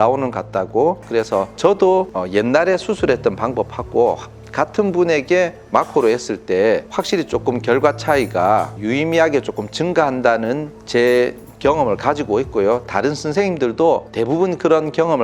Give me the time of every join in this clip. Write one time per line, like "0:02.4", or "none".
0:01.0